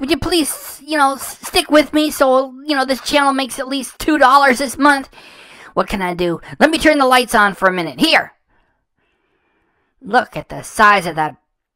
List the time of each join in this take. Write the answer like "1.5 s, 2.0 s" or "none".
none

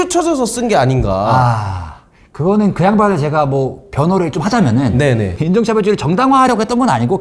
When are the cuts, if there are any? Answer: none

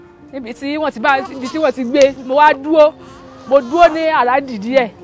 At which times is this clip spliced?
2.2 s

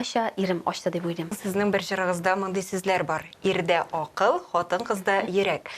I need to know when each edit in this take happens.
1.3 s

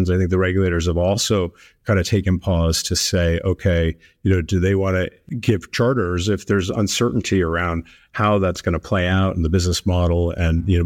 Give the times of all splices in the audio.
5.2 s

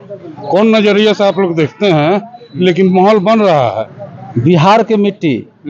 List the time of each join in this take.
3.9 s

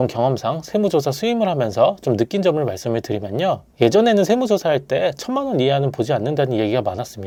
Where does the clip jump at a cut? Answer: none

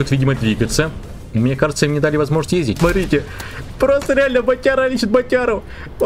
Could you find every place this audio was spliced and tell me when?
2.8 s

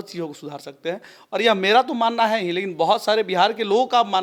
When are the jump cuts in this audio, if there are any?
none

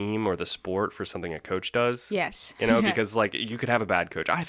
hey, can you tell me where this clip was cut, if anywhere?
none

